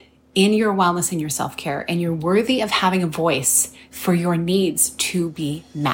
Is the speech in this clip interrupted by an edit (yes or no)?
no